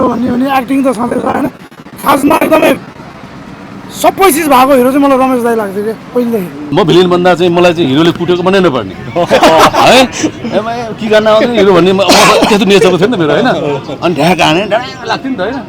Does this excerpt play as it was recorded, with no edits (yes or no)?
no